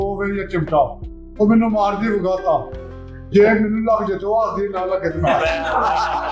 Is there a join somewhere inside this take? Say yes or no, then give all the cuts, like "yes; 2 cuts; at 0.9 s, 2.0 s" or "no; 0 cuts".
no; 0 cuts